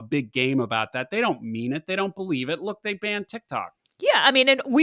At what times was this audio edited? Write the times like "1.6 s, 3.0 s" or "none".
3.8 s